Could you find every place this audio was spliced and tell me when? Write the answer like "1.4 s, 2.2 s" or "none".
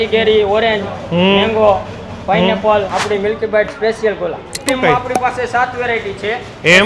4.6 s